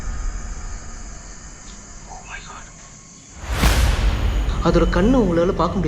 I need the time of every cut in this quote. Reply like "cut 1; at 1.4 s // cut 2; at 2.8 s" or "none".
cut 1; at 3.3 s // cut 2; at 4.4 s

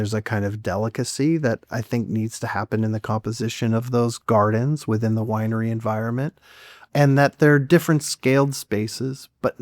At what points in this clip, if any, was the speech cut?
cut 1; at 4.2 s

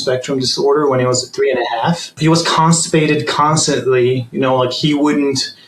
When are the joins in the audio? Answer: cut 1; at 2.1 s

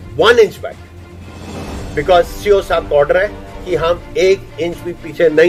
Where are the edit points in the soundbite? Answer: none

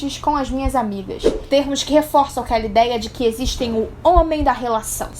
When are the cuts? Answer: cut 1; at 1.3 s

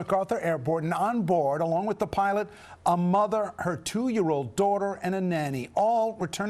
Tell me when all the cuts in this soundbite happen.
none

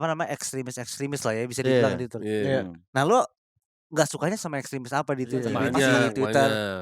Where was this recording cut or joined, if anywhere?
cut 1; at 5.5 s

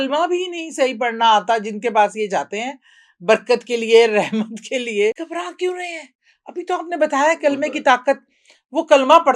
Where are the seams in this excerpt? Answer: cut 1; at 5.2 s

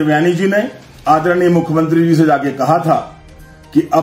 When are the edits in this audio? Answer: none

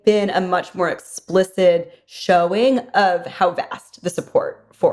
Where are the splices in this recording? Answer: none

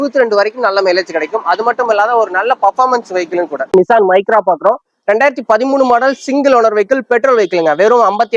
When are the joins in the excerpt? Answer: cut 1; at 3.7 s

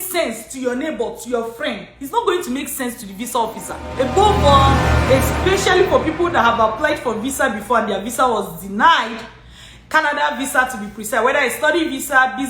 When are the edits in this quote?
cut 1; at 3.8 s

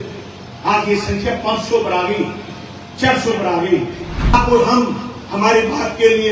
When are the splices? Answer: cut 1; at 4.3 s

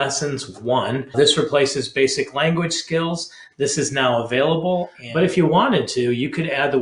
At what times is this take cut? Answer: cut 1; at 1.1 s // cut 2; at 5.0 s

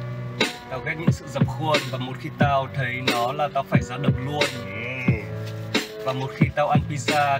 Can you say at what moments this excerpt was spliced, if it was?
none

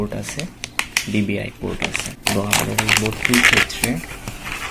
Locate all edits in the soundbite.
cut 1; at 2.1 s

